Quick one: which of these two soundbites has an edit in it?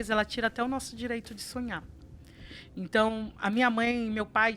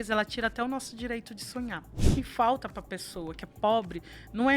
second; 1 cut; at 2.1 s

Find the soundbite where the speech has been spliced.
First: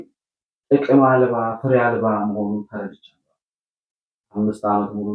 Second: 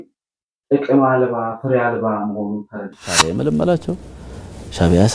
second; 1 cut; at 3.2 s

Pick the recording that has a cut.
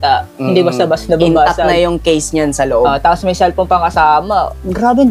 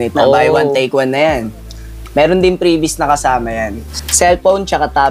second; 1 cut; at 3.9 s

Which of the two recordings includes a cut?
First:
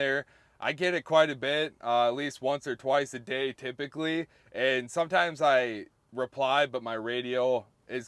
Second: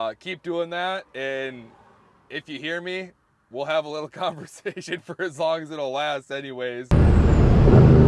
second; 1 cut; at 6.8 s

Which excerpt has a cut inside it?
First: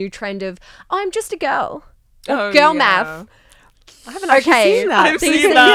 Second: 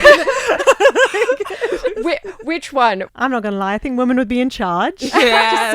second; 1 cut; at 3.1 s

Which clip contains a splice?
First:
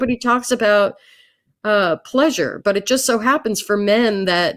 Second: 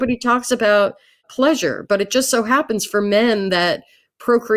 second; 1 cut; at 1.3 s

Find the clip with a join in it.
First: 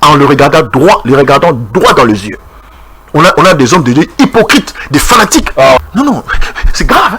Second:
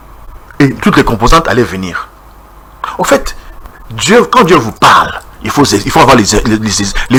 first; 1 cut; at 5.8 s

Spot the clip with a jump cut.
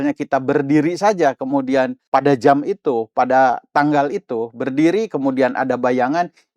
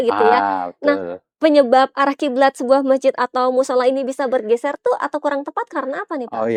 first; 1 cut; at 2.0 s

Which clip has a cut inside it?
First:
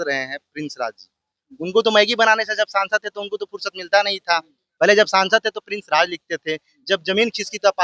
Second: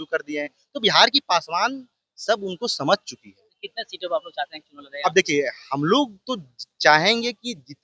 first; 1 cut; at 4.6 s

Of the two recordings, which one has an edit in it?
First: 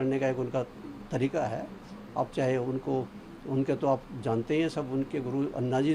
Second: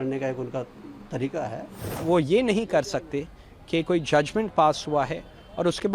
second; 1 cut; at 1.9 s

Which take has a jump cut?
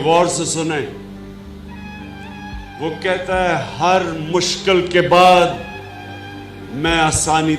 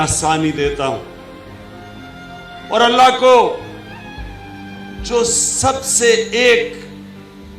first; 2 cuts; at 1.1 s, 2.8 s

